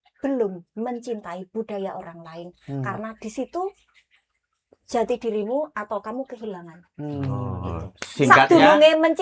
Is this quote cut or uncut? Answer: uncut